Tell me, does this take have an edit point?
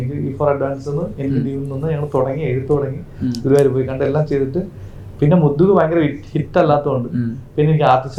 no; 0 cuts

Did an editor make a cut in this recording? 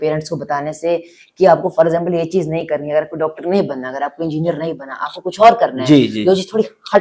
no; 0 cuts

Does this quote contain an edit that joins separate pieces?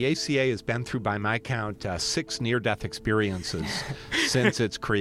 no; 0 cuts

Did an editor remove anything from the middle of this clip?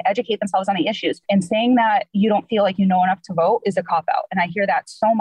yes; 2 cuts; at 1.2 s, 2.1 s

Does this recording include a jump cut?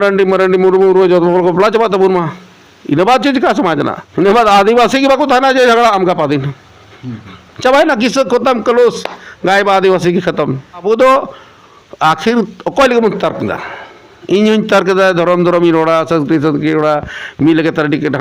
yes; 2 cuts; at 4.0 s, 10.8 s

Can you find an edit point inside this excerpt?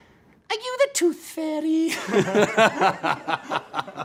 no; 0 cuts

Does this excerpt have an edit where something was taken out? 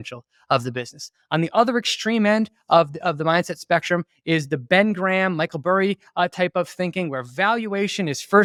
no; 0 cuts

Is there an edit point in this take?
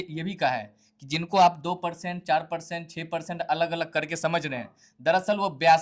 no; 0 cuts

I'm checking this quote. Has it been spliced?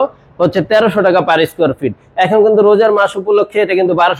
no; 0 cuts

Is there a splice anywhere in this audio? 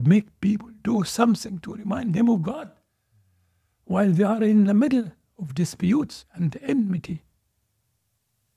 no; 0 cuts

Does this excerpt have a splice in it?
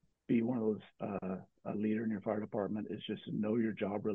no; 0 cuts

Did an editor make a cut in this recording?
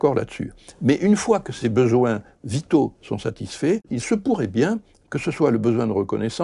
yes; 2 cuts; at 1.6 s, 3.9 s

